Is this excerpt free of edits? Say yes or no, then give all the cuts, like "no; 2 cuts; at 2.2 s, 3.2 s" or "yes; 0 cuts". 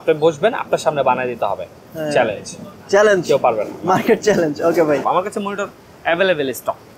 yes; 0 cuts